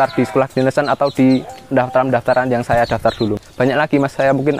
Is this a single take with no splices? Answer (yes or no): no